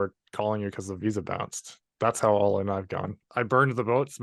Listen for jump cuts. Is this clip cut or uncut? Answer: cut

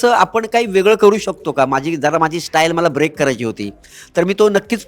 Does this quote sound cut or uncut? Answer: uncut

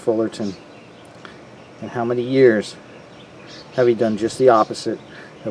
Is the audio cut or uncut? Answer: uncut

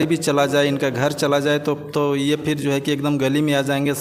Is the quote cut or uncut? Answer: uncut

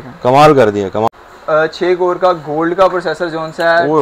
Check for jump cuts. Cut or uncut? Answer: cut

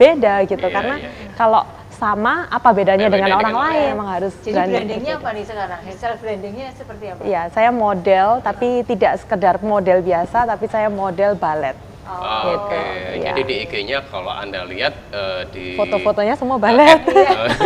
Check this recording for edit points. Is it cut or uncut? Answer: cut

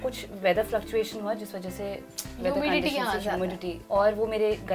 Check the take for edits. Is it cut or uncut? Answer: uncut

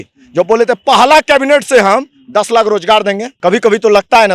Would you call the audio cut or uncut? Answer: cut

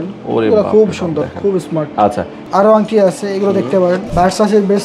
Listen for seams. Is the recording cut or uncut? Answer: cut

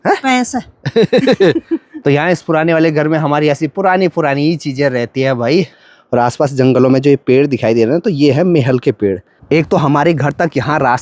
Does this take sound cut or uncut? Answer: cut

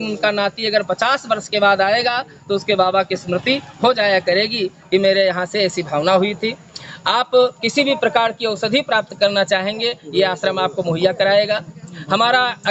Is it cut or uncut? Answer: uncut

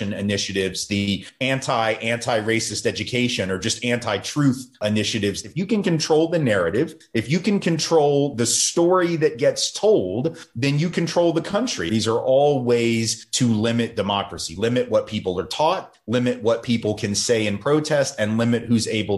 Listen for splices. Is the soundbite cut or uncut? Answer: cut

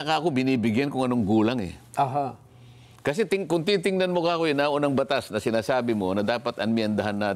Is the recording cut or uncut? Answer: uncut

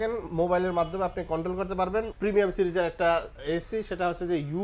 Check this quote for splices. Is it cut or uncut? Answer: cut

